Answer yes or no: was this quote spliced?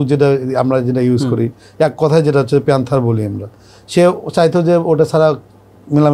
no